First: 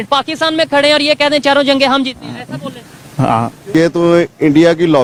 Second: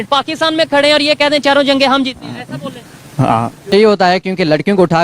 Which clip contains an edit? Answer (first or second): second